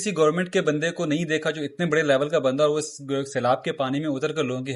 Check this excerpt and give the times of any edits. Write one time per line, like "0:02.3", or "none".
none